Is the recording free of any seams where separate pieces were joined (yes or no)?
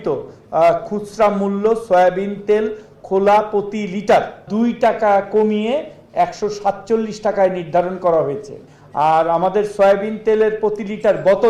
yes